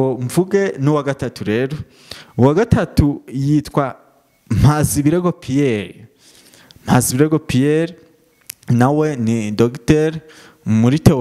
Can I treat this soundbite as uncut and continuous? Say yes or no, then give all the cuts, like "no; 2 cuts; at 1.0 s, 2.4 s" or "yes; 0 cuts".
yes; 0 cuts